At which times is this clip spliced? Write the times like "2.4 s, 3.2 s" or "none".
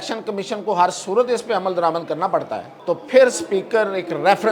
2.7 s